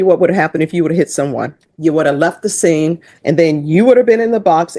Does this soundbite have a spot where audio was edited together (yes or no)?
yes